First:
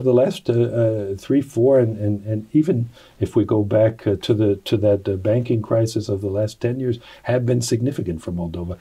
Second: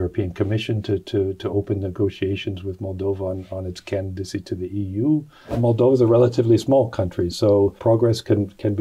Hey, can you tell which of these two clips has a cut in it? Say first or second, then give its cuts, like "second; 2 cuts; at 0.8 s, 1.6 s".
second; 2 cuts; at 5.6 s, 7.8 s